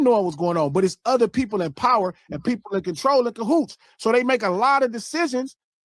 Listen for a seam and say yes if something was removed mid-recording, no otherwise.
no